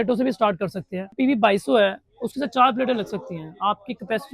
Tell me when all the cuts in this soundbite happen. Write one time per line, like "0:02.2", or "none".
0:01.1